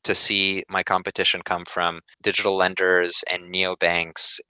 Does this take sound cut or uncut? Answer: cut